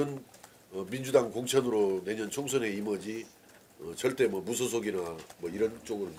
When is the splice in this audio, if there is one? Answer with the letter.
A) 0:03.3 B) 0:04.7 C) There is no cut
C